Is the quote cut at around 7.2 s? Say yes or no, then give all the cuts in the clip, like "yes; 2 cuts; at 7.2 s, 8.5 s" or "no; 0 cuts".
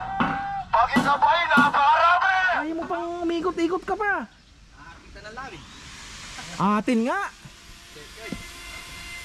no; 1 cut; at 2.6 s